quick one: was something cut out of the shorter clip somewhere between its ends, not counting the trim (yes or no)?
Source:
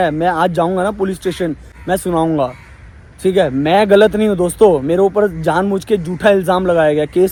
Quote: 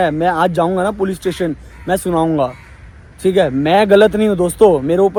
no